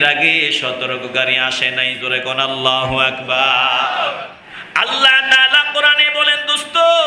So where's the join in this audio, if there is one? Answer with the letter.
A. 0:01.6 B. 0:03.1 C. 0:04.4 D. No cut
C